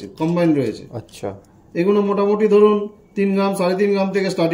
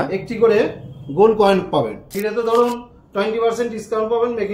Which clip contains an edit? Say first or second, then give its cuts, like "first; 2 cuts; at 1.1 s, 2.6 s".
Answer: second; 1 cut; at 2.1 s